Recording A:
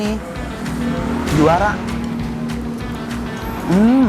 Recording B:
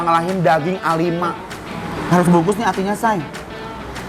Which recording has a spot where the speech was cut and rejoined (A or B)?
B